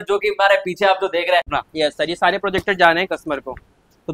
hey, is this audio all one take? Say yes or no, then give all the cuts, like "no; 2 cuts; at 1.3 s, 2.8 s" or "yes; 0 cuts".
no; 1 cut; at 1.5 s